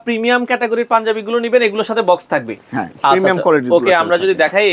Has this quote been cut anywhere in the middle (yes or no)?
no